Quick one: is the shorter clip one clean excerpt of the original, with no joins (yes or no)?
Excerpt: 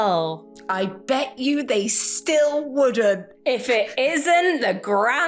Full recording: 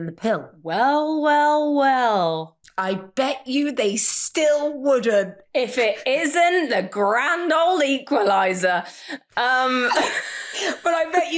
yes